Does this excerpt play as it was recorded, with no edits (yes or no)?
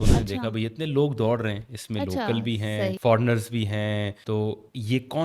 no